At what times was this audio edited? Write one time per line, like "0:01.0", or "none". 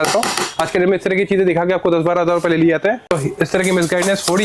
0:03.0

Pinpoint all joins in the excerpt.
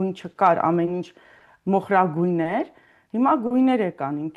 none

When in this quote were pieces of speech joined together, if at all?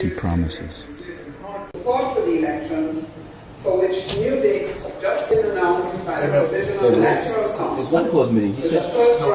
0:01.7

